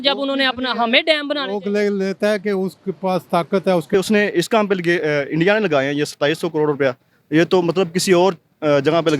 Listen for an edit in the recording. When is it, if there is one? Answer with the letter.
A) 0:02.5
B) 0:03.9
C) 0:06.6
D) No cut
B